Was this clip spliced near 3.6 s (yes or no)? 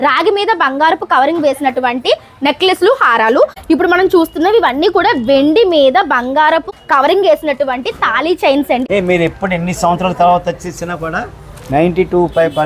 yes